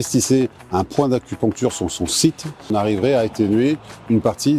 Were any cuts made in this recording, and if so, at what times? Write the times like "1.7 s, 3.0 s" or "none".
2.7 s